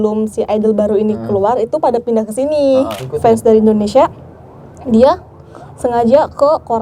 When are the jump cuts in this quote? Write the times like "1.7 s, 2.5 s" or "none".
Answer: 3.0 s